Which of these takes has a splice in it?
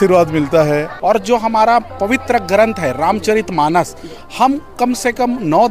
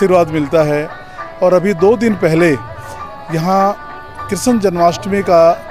first; 1 cut; at 0.9 s

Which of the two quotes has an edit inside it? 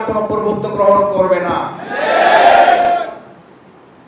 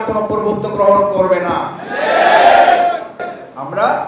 second; 1 cut; at 2.9 s

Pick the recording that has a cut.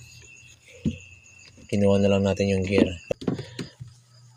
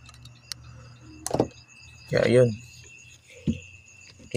first; 1 cut; at 3.1 s

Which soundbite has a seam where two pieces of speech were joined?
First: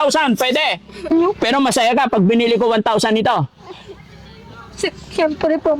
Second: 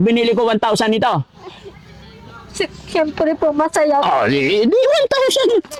first; 1 cut; at 1.1 s

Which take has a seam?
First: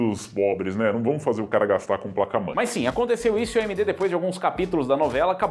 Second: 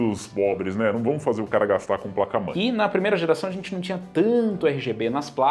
second; 1 cut; at 2.5 s

